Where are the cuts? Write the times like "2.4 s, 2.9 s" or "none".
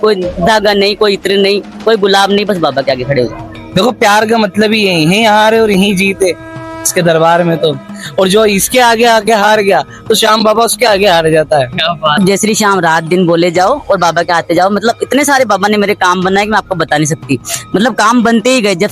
3.5 s, 12.2 s